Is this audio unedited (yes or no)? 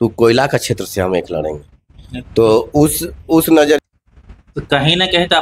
no